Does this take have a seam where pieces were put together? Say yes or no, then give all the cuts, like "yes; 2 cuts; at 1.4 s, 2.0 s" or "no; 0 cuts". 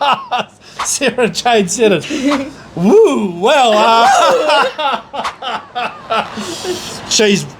no; 0 cuts